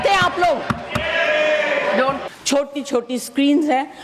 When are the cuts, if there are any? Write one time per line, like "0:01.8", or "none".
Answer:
0:02.3